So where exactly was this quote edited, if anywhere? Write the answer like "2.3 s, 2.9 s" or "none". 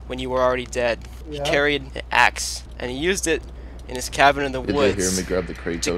1.2 s, 1.9 s, 2.6 s